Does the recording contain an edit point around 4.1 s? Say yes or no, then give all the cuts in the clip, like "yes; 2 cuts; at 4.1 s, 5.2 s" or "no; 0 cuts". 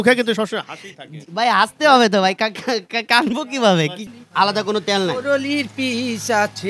yes; 1 cut; at 4.1 s